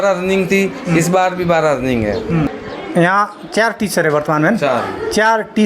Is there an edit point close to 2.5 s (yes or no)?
yes